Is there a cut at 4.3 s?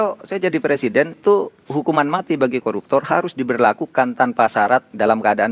no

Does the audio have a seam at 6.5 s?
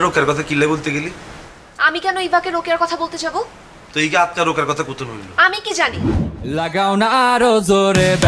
yes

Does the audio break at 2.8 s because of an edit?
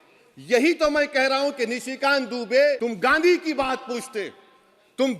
yes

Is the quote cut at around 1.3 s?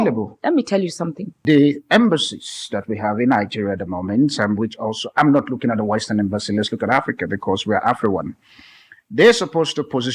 yes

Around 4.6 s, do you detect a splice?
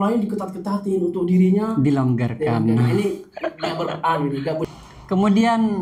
yes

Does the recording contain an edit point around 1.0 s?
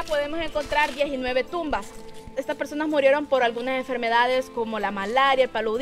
no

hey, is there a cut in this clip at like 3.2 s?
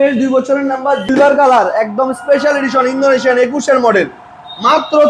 no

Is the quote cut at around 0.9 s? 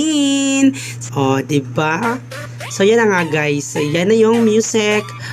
yes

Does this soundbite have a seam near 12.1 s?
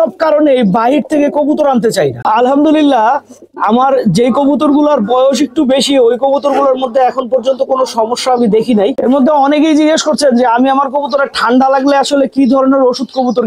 no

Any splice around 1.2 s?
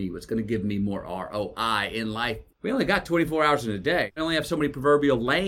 no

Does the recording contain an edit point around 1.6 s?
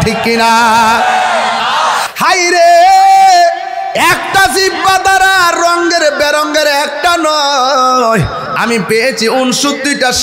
yes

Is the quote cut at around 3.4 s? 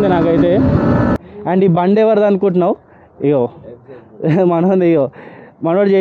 no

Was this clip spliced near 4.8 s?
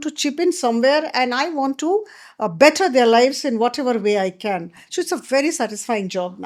no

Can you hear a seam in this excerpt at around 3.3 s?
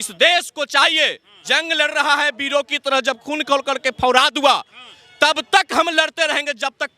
no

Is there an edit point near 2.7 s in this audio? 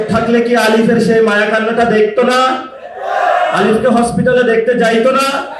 no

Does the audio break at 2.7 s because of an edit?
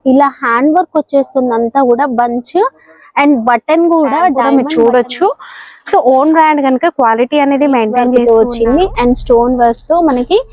no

